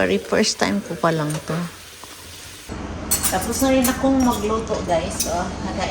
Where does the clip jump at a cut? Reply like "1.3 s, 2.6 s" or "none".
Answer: 2.7 s